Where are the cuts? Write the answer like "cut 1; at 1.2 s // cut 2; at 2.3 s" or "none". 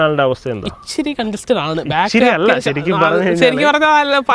none